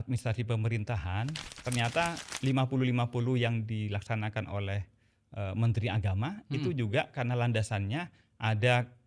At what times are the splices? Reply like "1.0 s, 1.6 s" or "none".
1.5 s